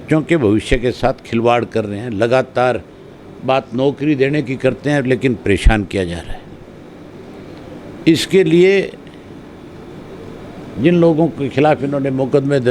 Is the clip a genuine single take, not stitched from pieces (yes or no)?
yes